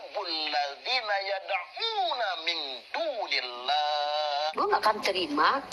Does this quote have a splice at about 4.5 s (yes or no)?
yes